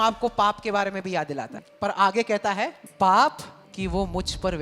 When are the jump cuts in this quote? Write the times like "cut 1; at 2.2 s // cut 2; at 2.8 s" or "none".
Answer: cut 1; at 1.6 s // cut 2; at 2.8 s // cut 3; at 3.6 s